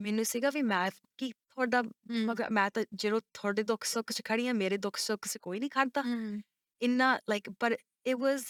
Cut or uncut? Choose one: uncut